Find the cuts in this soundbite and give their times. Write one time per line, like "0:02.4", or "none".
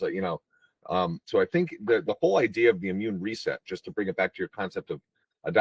0:01.3